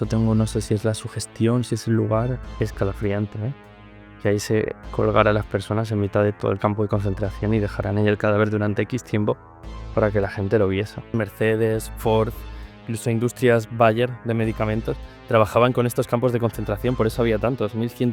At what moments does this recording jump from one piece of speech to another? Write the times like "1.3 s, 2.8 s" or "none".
2.4 s, 11.1 s